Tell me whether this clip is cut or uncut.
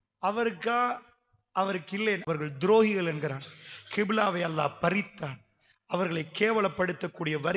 cut